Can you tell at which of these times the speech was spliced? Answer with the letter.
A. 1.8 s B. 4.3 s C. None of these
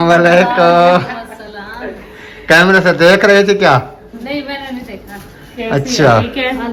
C